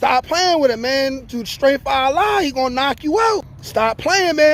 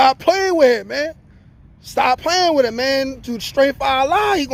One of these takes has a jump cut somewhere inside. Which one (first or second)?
first